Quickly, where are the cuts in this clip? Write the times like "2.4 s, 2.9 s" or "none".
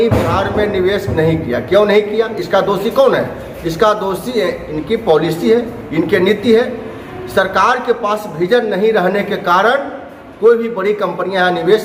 none